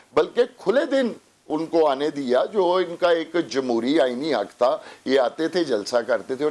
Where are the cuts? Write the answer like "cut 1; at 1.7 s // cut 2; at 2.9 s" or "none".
none